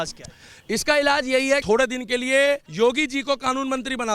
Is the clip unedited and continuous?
no; 2 cuts; at 1.6 s, 2.7 s

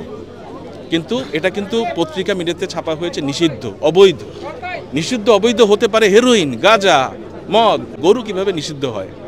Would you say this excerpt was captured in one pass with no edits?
no; 1 cut; at 7.9 s

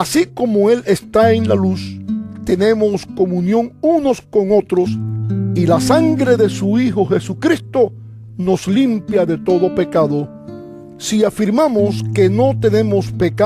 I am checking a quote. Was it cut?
yes; 1 cut; at 1.3 s

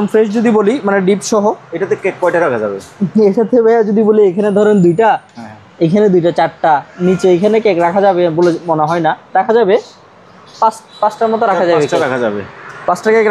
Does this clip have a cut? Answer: no; 0 cuts

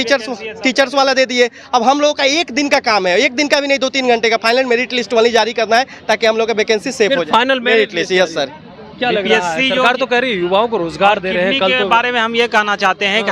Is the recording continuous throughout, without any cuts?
yes; 0 cuts

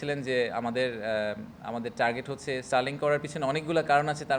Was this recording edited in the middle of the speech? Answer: no; 0 cuts

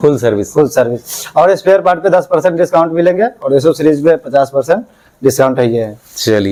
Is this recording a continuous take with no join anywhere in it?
yes; 0 cuts

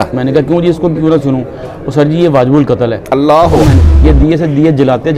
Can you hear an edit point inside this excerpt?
yes; 1 cut; at 3.8 s

